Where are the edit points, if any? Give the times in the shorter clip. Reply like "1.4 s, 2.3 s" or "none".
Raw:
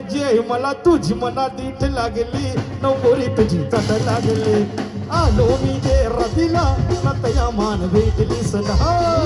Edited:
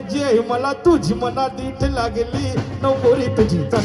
none